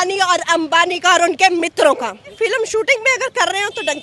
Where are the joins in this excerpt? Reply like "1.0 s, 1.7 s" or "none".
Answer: 2.3 s